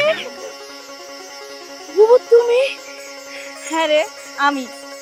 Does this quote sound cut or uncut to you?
uncut